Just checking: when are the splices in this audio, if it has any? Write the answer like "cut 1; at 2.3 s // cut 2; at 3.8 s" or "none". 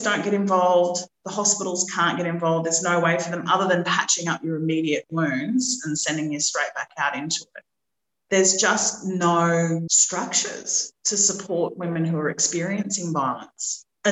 cut 1; at 10.0 s